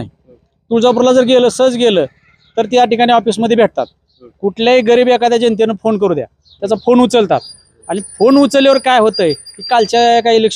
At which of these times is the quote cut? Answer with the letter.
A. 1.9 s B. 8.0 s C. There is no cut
C